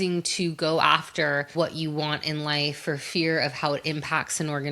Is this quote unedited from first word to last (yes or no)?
no